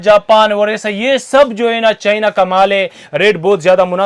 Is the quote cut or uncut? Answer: uncut